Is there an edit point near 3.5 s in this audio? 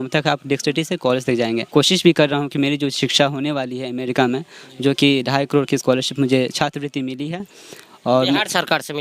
no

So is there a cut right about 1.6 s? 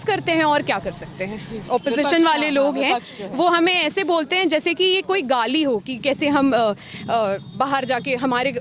yes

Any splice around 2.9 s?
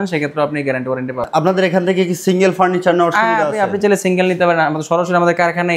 no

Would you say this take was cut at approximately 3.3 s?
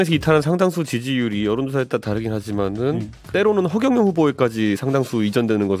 yes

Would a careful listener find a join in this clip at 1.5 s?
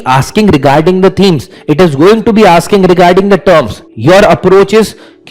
no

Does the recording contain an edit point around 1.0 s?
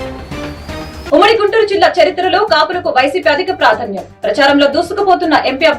yes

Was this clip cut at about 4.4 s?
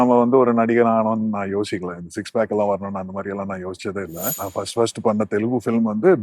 yes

